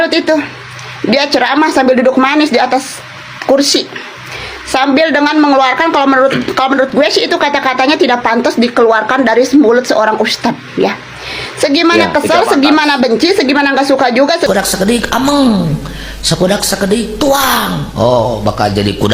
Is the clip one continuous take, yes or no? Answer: no